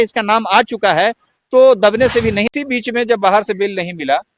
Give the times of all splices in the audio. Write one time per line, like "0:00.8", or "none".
0:02.5